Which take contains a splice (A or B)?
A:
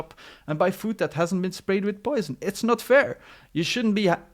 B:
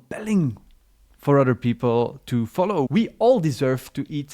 B